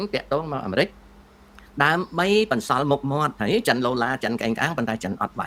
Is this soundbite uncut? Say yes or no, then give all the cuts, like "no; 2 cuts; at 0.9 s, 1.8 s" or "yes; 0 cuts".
yes; 0 cuts